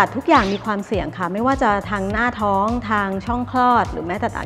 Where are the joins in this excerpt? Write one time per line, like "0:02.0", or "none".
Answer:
none